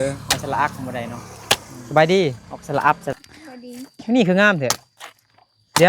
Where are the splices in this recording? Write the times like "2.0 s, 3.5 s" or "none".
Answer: 1.7 s, 2.5 s, 3.1 s